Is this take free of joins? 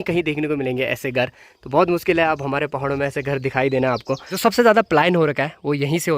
no; 1 cut; at 4.2 s

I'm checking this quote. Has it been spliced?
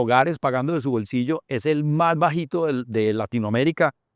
no; 0 cuts

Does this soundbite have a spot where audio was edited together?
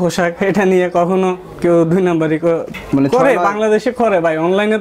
no; 0 cuts

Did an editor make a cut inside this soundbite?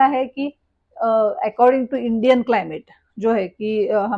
no; 0 cuts

